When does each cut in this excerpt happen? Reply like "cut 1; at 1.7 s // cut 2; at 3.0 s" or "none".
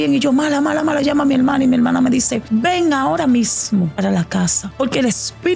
cut 1; at 2.4 s // cut 2; at 3.9 s // cut 3; at 4.6 s